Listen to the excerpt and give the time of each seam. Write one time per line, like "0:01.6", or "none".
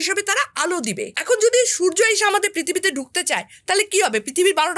0:01.1